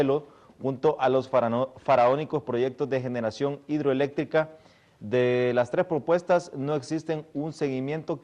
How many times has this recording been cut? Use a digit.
1